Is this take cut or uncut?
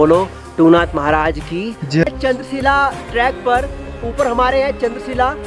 cut